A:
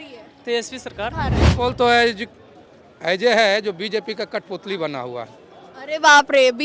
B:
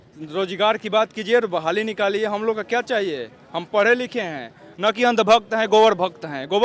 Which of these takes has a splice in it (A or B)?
A